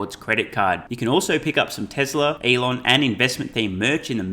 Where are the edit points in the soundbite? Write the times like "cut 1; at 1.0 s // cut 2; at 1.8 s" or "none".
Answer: cut 1; at 2.4 s